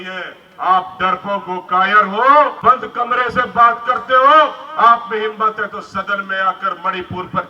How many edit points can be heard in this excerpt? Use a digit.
1